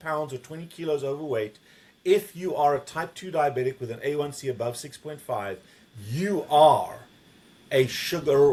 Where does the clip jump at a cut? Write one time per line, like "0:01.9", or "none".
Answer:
none